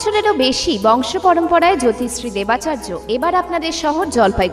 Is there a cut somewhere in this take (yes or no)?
no